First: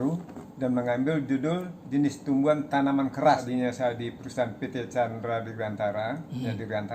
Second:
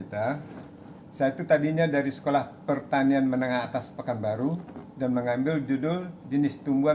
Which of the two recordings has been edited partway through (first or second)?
first